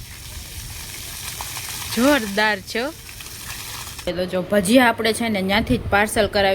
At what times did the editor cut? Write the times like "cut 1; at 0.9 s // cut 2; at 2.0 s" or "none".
cut 1; at 4.1 s